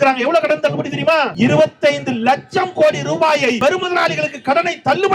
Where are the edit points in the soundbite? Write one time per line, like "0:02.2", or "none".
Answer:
0:01.3
0:03.6